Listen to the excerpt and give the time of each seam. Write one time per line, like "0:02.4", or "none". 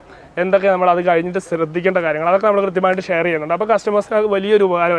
none